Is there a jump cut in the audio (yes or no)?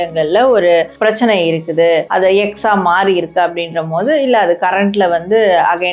yes